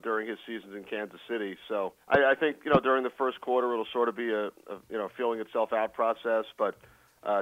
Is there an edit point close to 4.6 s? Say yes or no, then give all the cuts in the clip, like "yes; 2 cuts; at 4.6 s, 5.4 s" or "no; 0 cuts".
no; 1 cut; at 2.0 s